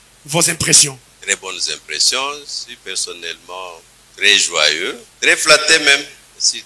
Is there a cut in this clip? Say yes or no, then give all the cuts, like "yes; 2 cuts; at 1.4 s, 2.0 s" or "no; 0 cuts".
yes; 2 cuts; at 1.1 s, 5.1 s